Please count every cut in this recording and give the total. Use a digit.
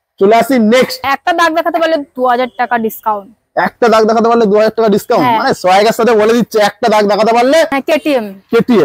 2